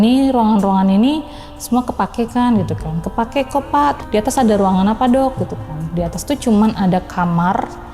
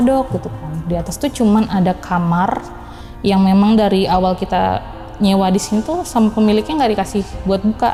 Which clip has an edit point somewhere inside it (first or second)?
first